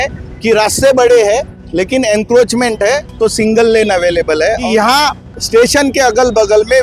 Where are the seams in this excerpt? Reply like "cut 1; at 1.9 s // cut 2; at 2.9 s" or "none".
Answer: cut 1; at 4.6 s